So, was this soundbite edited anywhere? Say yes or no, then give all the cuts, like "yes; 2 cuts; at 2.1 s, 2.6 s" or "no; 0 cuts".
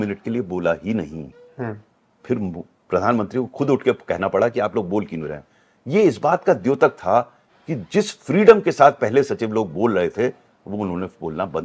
no; 0 cuts